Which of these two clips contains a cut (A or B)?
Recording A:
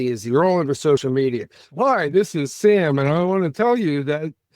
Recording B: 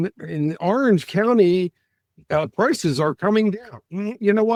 A